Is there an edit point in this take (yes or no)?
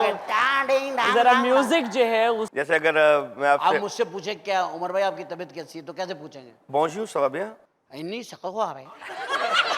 yes